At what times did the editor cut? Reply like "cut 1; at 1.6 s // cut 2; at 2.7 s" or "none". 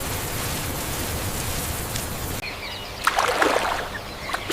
cut 1; at 2.4 s